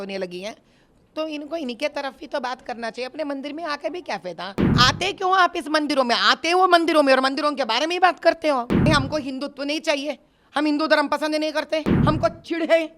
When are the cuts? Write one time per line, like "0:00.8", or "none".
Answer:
0:04.7
0:08.9
0:11.9

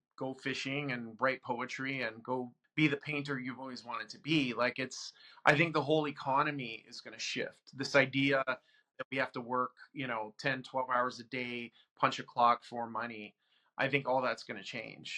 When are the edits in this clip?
0:02.6

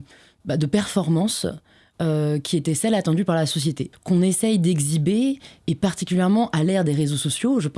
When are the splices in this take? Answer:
0:03.9

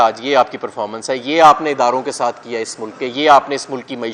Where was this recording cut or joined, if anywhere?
none

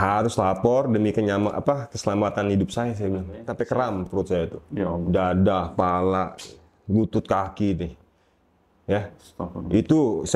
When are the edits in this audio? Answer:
0:03.4

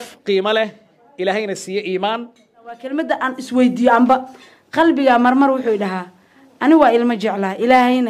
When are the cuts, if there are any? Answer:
0:03.0

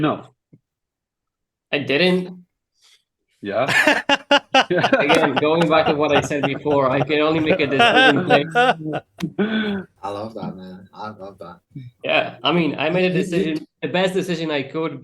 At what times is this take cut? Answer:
0:09.9

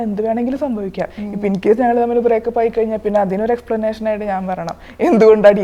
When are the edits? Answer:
none

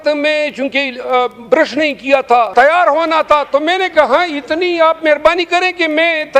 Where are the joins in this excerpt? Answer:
0:02.5

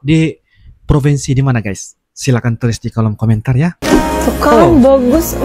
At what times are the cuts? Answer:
0:03.8

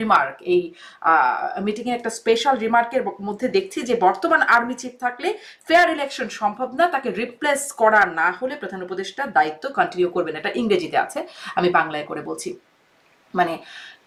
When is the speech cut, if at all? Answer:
none

